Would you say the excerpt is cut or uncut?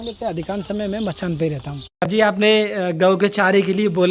cut